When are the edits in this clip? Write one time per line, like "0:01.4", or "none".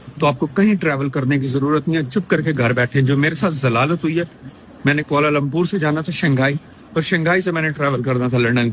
none